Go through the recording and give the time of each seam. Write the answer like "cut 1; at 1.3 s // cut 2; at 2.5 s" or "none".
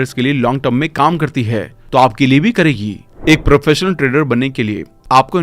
cut 1; at 3.1 s